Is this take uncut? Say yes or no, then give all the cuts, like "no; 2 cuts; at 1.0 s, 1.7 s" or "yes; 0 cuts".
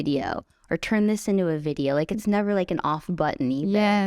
yes; 0 cuts